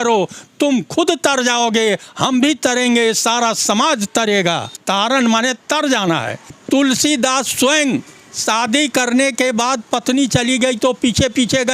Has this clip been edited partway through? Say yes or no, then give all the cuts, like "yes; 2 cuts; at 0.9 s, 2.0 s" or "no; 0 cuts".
yes; 2 cuts; at 4.7 s, 6.5 s